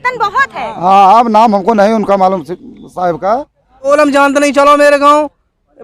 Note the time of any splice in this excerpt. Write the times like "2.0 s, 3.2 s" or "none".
3.9 s